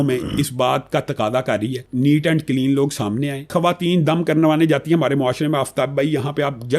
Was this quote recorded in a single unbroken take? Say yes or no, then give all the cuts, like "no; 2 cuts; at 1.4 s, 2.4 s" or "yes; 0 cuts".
no; 2 cuts; at 1.8 s, 3.5 s